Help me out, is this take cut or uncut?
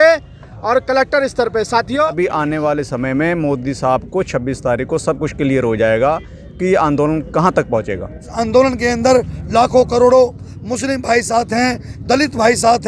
cut